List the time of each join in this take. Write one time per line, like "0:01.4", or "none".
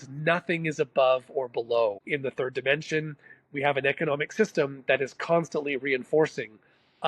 0:02.0

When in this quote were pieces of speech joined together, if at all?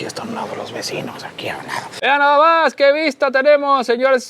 0:02.0

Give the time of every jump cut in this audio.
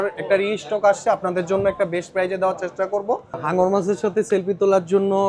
0:03.4

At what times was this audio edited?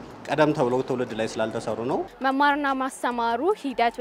0:02.1

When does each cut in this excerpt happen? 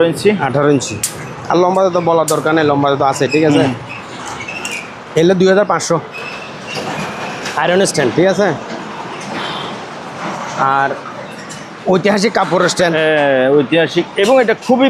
none

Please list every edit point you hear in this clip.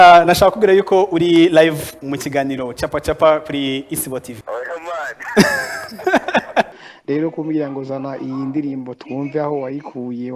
0:04.4
0:06.7

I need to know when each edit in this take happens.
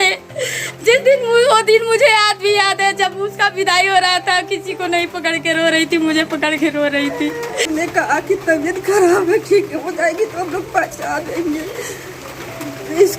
0:07.7

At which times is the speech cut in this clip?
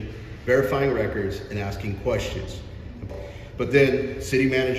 0:03.1

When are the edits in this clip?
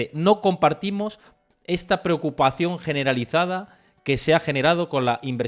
none

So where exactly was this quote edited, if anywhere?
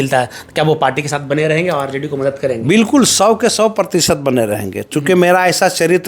none

